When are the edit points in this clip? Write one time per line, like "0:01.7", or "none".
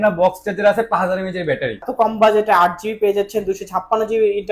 0:01.8